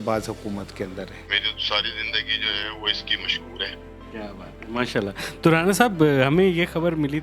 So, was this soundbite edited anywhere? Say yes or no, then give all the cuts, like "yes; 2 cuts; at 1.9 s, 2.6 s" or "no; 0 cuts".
yes; 1 cut; at 1.2 s